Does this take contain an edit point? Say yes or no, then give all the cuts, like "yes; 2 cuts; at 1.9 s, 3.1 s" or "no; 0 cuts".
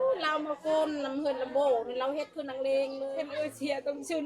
yes; 1 cut; at 3.2 s